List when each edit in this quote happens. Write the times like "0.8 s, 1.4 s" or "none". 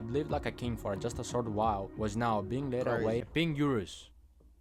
3.3 s